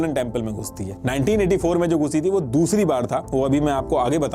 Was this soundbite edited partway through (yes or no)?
no